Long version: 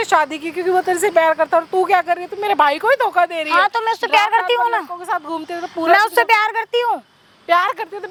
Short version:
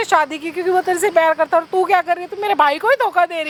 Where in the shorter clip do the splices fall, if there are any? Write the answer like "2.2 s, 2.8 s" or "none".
none

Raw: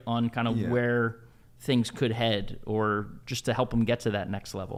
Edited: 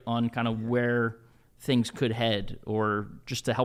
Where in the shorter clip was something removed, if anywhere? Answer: none

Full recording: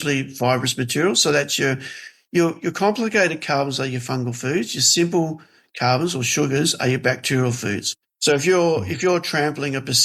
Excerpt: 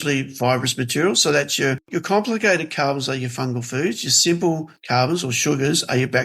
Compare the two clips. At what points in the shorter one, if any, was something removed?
1.9 s, 4.7 s

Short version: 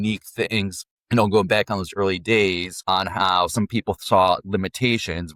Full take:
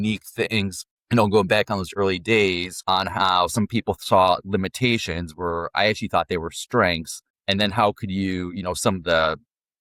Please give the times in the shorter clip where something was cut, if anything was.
none

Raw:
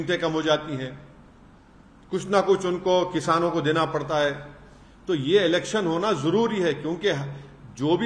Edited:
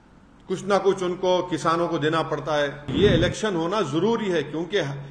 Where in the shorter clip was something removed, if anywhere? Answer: 2.9 s

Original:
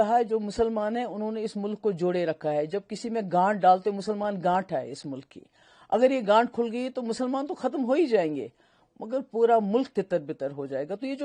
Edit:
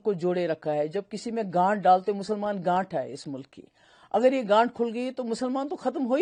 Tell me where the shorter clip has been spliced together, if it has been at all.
none

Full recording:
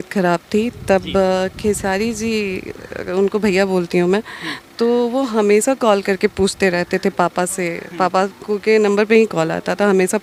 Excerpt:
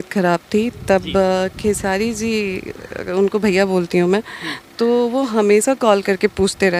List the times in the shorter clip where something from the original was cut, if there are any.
none

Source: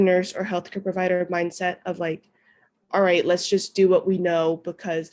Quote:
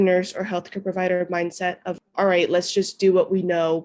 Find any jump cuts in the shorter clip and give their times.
2.0 s

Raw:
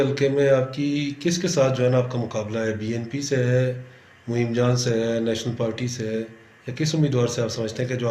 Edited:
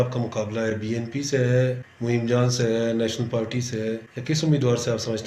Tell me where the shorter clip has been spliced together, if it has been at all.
1.9 s, 4.1 s

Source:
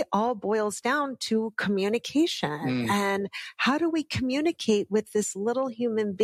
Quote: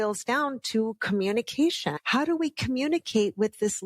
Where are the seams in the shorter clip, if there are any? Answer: 1.9 s

